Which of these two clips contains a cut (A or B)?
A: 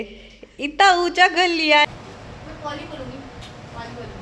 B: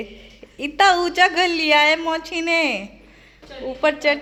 A